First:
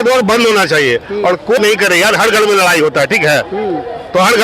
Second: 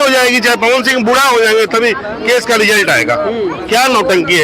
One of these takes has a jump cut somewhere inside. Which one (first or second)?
first